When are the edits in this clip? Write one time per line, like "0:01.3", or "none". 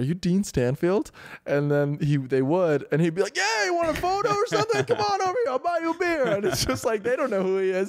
none